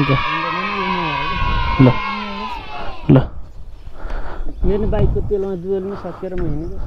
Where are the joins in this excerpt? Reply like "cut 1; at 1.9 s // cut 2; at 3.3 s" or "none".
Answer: none